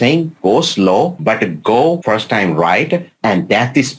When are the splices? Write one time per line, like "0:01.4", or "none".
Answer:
0:01.2
0:02.0